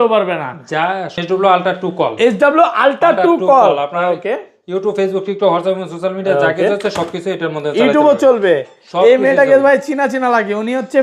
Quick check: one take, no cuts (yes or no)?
no